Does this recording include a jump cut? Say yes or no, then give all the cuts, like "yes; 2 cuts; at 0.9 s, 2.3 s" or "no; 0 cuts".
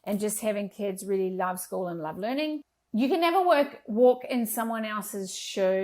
yes; 1 cut; at 2.6 s